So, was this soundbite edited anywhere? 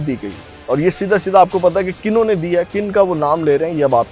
no; 0 cuts

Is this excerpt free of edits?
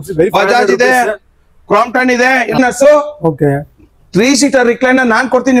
no; 1 cut; at 2.6 s

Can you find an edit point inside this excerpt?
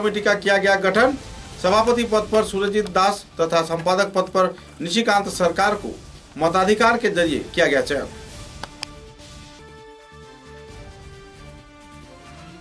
no; 0 cuts

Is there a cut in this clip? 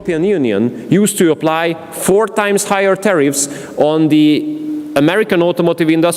no; 0 cuts

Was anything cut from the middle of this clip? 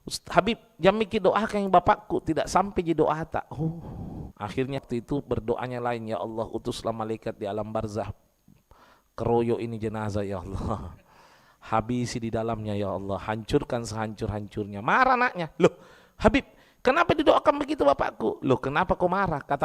yes; 1 cut; at 4.8 s

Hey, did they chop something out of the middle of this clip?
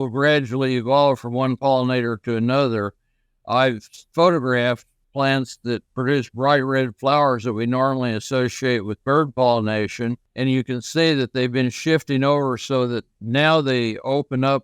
yes; 3 cuts; at 3.9 s, 5.0 s, 10.2 s

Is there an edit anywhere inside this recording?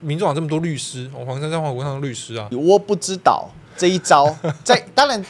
yes; 1 cut; at 2.5 s

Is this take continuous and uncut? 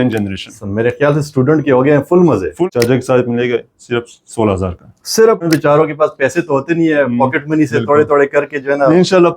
no; 2 cuts; at 2.6 s, 5.4 s

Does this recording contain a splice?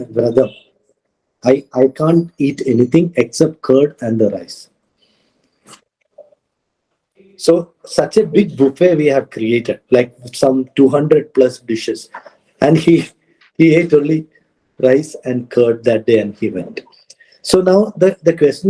no; 0 cuts

